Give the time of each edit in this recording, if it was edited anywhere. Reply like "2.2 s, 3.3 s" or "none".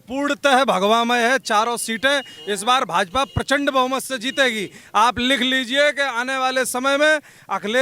none